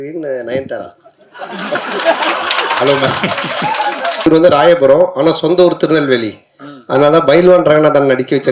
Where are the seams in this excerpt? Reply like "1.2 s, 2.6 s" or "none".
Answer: 4.3 s